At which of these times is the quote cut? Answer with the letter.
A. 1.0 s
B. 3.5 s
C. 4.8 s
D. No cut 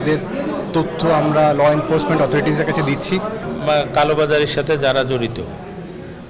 B